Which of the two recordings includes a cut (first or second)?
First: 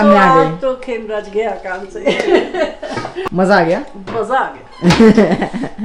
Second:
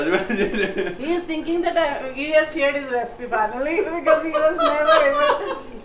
first